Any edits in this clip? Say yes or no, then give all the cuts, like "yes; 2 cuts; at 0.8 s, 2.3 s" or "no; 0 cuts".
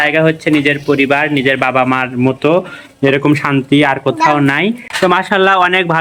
no; 0 cuts